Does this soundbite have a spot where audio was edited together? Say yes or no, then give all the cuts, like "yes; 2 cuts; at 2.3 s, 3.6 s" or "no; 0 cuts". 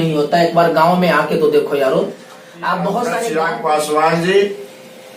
yes; 1 cut; at 3.3 s